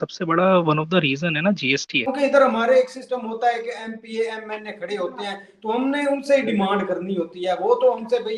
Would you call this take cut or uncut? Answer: cut